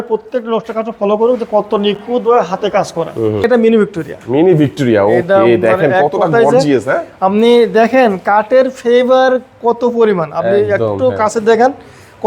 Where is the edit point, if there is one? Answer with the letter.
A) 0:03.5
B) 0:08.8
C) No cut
A